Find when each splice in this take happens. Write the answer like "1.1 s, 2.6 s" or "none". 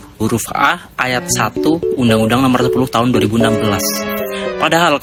none

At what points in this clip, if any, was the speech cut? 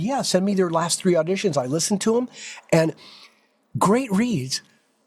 none

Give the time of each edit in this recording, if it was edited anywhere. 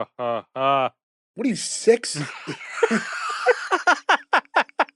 none

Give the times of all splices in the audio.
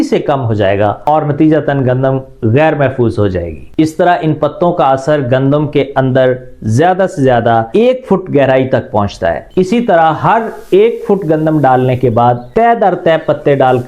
3.6 s, 9.4 s

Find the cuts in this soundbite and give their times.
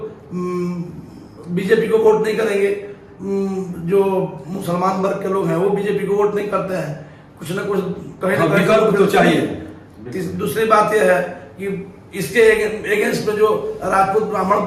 none

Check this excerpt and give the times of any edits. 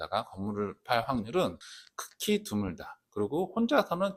none

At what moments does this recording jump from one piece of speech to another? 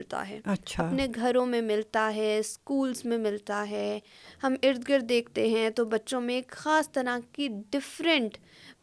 none

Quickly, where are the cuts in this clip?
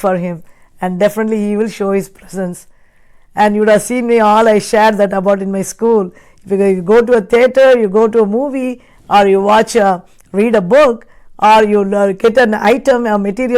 none

